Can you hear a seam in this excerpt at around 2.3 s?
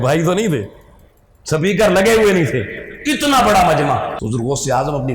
no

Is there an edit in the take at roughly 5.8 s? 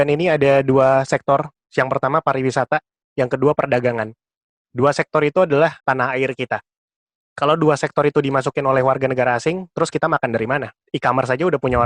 yes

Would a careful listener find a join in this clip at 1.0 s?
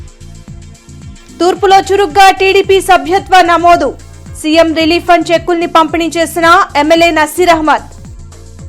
yes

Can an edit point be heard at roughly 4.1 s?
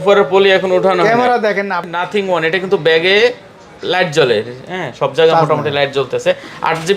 no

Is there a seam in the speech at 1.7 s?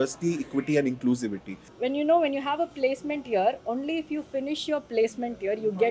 yes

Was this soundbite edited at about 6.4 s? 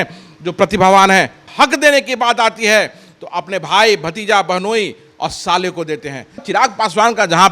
yes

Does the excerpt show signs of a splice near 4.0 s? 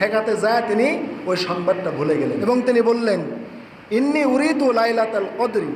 no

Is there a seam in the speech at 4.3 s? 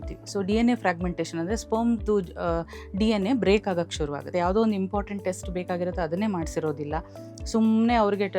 yes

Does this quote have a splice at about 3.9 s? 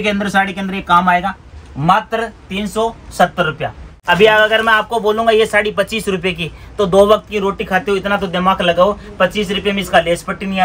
yes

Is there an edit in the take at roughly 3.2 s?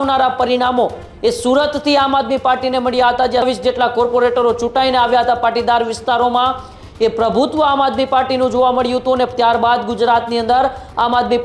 no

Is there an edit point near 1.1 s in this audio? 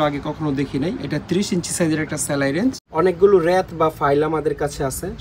no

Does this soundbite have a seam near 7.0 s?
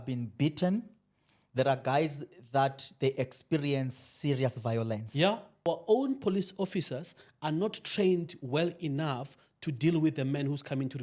no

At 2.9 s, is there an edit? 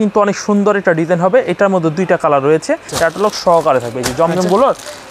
yes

